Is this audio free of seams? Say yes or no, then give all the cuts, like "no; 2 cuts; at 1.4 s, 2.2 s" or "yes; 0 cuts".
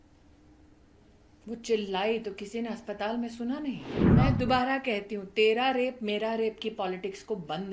no; 1 cut; at 4.0 s